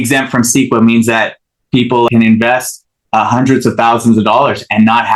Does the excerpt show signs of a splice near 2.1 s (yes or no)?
yes